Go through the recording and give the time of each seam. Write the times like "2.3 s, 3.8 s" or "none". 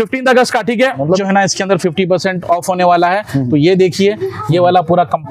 1.2 s